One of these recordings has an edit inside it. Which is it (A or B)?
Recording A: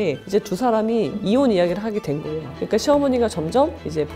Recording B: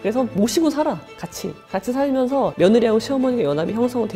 B